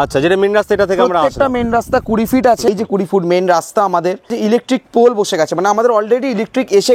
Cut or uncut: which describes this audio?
cut